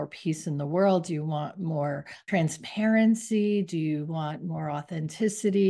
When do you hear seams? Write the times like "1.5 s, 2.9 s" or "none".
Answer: 2.2 s